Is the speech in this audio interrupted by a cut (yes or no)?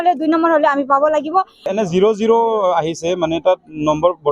yes